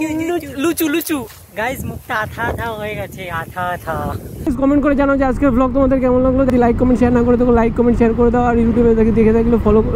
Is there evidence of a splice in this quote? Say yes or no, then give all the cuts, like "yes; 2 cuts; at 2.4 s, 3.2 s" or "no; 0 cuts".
yes; 1 cut; at 6.5 s